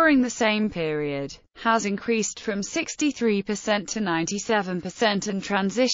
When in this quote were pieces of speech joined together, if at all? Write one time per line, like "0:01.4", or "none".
0:01.8